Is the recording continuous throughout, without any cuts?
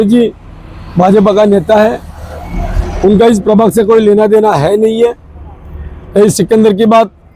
yes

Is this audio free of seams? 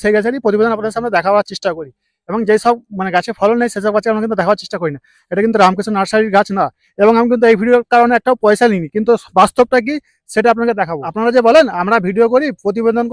no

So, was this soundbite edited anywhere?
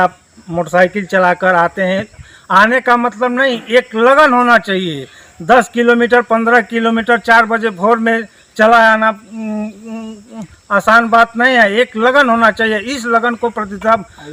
no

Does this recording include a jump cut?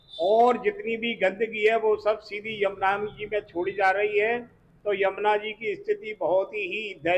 no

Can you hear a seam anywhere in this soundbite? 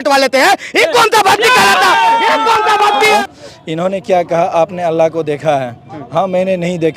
yes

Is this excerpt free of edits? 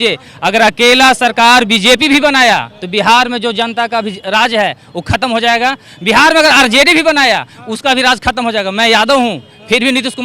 yes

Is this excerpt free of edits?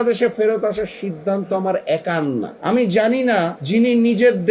no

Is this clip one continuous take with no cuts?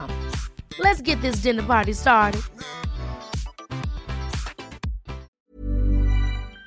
no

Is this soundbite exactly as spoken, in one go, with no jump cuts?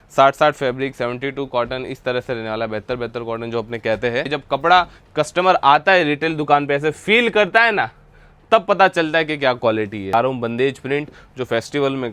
no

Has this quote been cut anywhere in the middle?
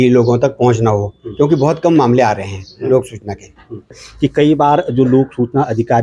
yes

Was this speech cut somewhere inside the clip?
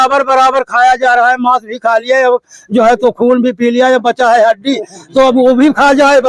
no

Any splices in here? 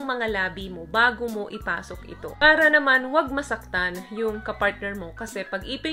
yes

